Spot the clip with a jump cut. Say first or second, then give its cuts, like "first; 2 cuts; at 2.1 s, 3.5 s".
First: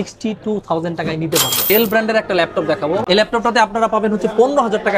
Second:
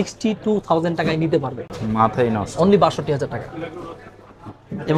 first; 2 cuts; at 1.7 s, 3.0 s